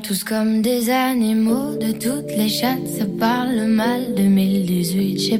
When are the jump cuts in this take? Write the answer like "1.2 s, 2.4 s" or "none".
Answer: none